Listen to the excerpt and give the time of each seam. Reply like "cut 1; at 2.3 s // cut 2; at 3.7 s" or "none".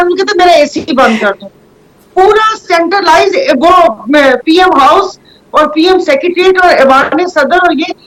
none